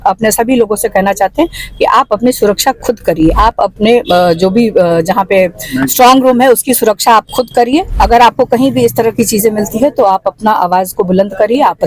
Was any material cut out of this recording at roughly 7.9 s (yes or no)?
yes